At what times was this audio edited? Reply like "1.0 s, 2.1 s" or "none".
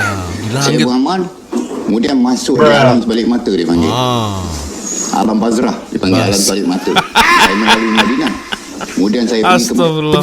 none

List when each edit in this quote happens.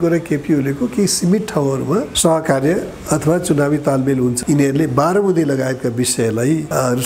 4.4 s

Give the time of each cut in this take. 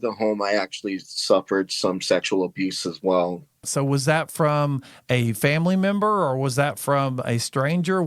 3.6 s

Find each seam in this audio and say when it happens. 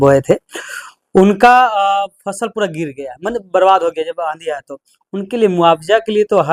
none

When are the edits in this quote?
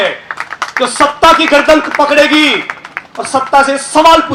none

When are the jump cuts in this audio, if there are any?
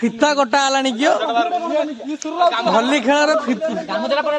none

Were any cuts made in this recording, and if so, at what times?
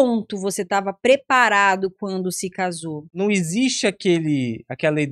3.1 s

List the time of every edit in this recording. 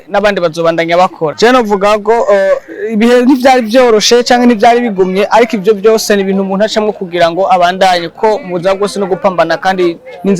1.3 s

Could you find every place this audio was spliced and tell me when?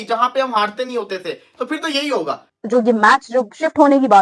2.5 s

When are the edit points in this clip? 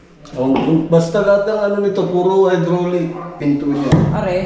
3.4 s

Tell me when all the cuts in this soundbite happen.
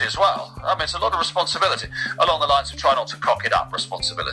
none

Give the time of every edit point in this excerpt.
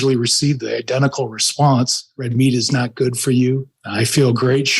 2.3 s, 3.8 s

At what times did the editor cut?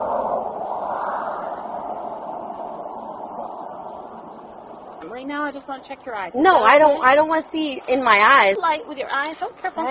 5.0 s, 8.6 s

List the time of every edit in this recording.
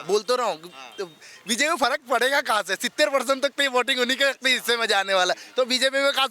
none

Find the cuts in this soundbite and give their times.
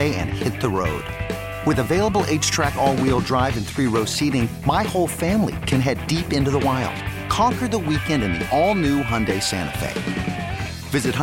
none

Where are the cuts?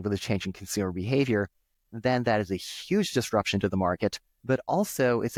none

